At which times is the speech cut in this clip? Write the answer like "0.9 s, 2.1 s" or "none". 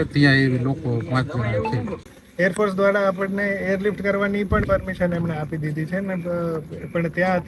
2.2 s